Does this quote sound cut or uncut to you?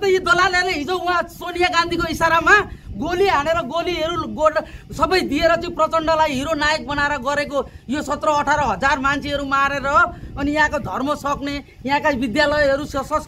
uncut